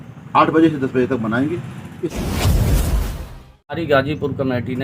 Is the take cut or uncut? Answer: cut